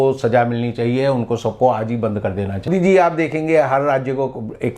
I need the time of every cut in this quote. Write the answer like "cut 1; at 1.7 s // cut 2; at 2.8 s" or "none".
cut 1; at 2.7 s